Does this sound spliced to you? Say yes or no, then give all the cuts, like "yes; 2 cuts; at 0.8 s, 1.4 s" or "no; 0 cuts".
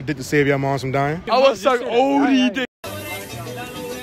yes; 1 cut; at 1.2 s